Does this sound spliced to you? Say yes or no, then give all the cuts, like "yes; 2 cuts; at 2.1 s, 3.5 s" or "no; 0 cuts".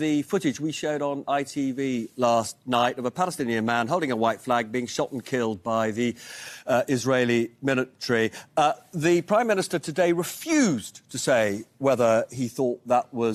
no; 0 cuts